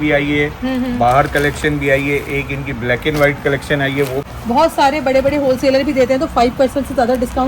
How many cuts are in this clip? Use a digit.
1